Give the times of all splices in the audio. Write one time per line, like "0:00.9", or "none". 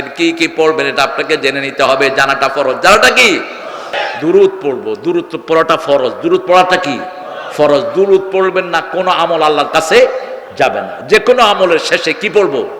0:04.0